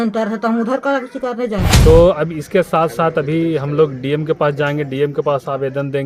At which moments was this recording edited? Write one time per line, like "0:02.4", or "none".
0:01.8

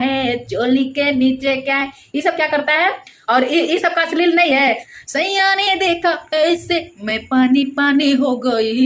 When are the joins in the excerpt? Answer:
none

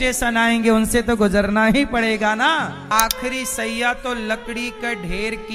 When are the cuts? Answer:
0:02.9

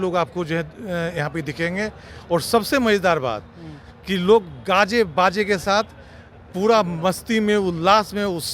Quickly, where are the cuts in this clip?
none

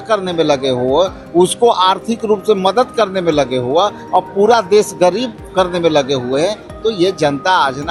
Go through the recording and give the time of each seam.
none

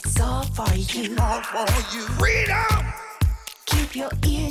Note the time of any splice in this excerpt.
none

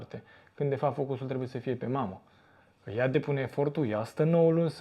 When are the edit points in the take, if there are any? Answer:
none

